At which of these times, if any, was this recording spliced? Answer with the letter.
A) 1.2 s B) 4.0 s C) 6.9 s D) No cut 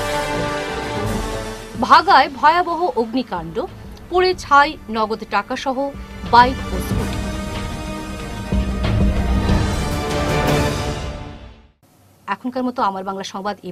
D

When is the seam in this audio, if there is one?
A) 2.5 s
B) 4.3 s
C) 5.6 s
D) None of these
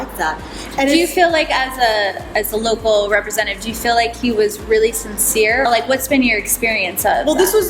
C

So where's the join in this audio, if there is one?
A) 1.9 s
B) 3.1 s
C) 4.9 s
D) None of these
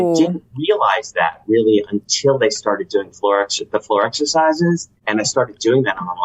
C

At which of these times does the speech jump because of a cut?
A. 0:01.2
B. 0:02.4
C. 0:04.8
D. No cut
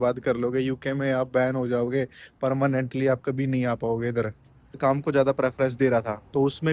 C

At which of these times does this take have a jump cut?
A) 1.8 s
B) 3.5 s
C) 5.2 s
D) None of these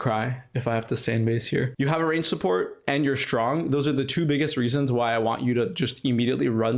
D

